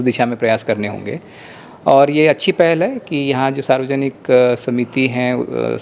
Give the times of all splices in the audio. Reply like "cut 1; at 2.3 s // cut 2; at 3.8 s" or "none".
none